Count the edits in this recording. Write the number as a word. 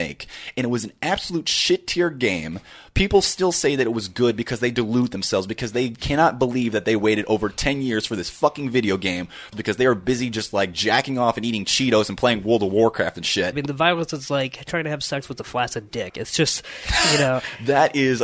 two